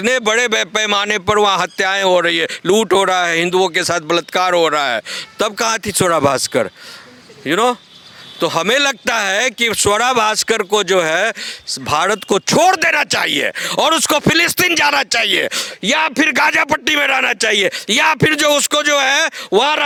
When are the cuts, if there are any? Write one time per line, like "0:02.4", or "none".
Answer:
none